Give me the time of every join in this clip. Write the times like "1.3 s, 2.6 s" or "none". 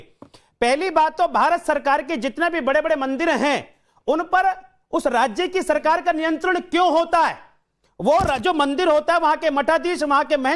none